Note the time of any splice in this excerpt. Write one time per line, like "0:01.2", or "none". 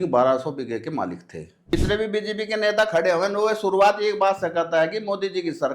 0:01.7